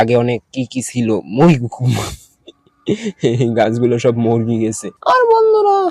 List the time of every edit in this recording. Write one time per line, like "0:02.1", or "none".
0:04.9